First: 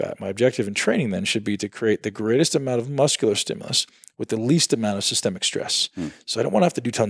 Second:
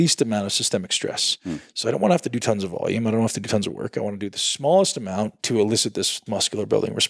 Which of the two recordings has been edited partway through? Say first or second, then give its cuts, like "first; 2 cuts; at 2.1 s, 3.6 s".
second; 2 cuts; at 5.4 s, 6.2 s